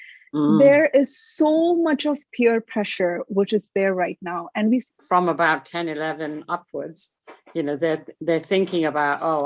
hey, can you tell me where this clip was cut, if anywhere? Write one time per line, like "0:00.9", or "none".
0:04.8